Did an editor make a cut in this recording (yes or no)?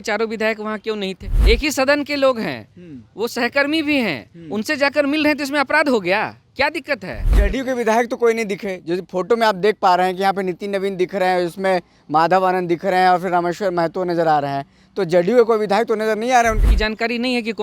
yes